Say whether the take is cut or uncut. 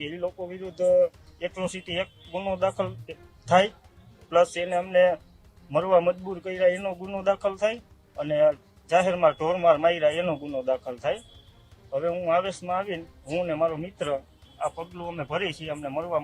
uncut